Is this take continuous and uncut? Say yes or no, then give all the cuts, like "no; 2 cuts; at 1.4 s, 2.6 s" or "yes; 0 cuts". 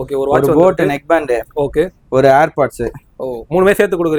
yes; 0 cuts